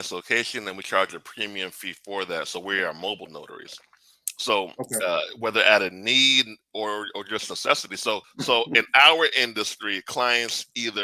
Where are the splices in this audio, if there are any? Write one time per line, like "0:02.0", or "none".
0:08.3

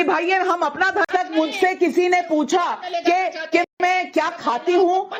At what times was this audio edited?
0:01.1

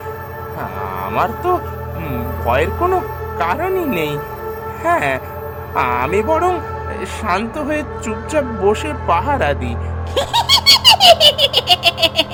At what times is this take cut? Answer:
none

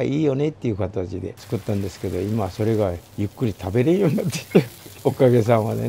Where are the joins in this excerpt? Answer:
0:01.4
0:04.8

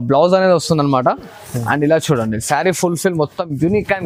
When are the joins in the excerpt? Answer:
none

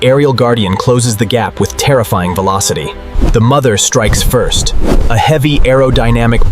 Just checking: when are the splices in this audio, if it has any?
0:03.2

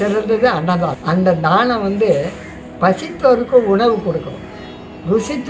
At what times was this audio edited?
0:01.0

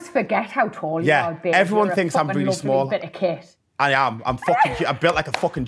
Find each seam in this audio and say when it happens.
none

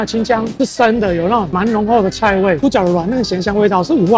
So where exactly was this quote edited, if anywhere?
0:02.6

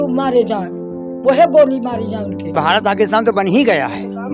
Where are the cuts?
0:02.5

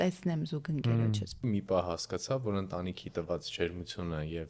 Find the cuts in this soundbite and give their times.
0:01.4

